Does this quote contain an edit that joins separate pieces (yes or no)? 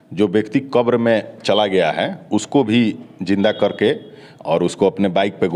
no